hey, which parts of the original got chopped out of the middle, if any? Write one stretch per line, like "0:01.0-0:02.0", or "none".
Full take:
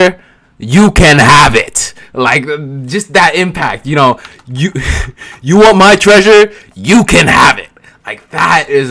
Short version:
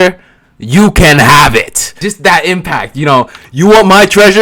0:01.8-0:02.7
0:04.3-0:05.3

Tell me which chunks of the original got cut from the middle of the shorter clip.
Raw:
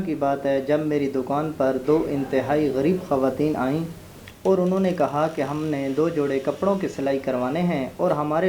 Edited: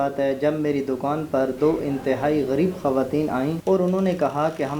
0:03.8-0:04.4

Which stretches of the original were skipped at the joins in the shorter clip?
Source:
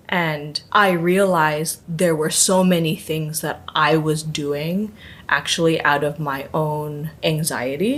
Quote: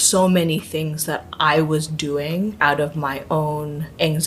0:04.9-0:05.8

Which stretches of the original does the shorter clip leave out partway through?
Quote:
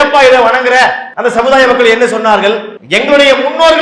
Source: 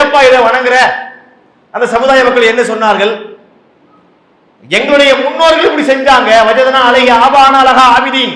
0:01.1-0:01.6
0:03.3-0:04.5

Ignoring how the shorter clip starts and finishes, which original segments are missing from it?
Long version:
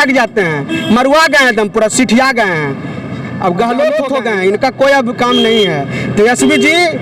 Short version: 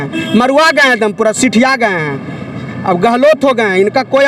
0:03.9-0:04.0

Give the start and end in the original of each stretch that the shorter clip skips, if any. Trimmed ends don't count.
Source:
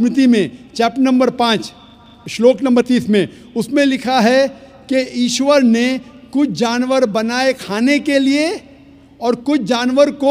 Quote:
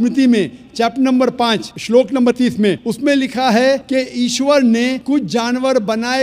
0:01.7-0:02.2
0:03.4-0:03.6
0:04.5-0:04.8
0:06.0-0:06.3

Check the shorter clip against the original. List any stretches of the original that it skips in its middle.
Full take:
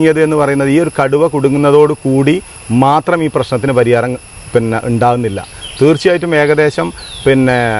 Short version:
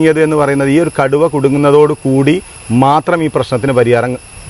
none

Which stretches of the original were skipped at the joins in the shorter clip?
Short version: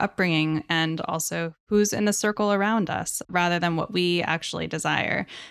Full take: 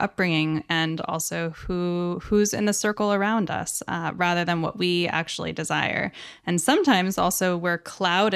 0:01.6-0:02.2
0:03.8-0:04.1

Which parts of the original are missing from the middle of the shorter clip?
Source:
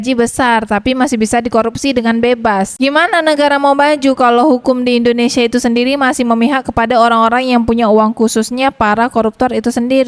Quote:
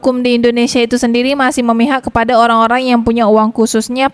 none

